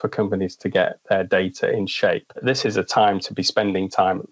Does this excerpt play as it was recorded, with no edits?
no; 1 cut; at 2.4 s

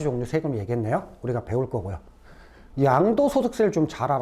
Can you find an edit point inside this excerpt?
yes; 1 cut; at 2.6 s

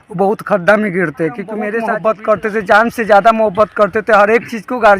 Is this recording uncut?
no; 1 cut; at 1.8 s

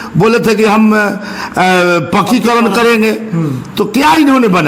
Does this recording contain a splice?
no; 0 cuts

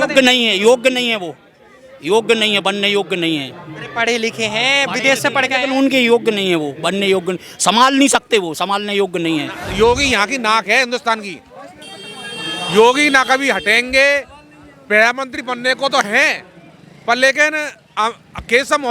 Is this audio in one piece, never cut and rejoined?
no; 1 cut; at 9.6 s

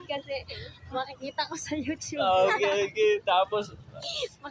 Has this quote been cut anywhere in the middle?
no; 0 cuts

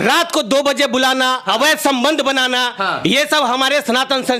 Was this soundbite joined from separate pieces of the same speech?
no; 0 cuts

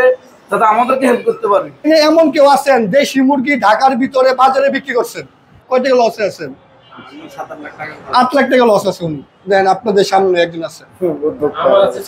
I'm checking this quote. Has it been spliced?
yes; 2 cuts; at 1.9 s, 5.5 s

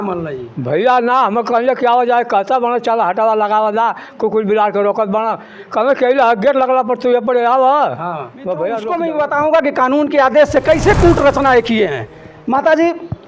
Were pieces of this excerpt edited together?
yes; 1 cut; at 8.9 s

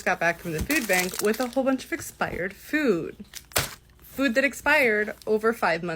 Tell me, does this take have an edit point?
no; 0 cuts

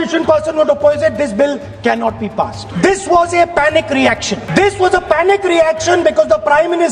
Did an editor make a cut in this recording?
yes; 2 cuts; at 2.6 s, 4.5 s

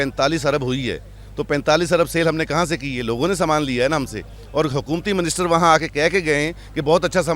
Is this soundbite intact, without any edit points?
yes; 0 cuts

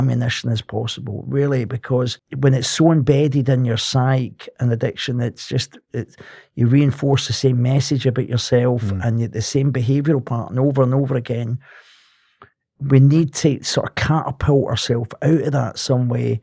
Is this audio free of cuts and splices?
no; 1 cut; at 2.2 s

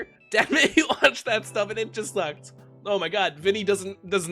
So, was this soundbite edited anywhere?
no; 0 cuts

